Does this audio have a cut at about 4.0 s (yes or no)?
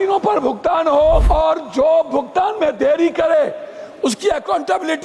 no